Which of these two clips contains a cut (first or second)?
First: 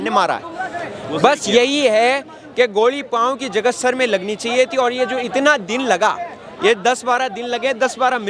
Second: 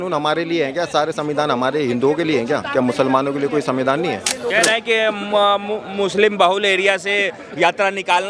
second